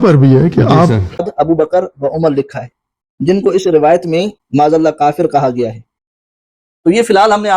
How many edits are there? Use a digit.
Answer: 1